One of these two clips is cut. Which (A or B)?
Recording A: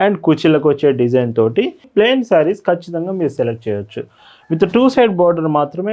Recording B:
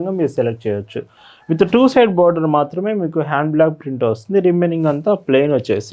A